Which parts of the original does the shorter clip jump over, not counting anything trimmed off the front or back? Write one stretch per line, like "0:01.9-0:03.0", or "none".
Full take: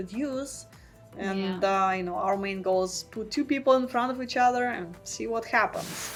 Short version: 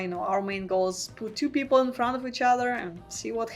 none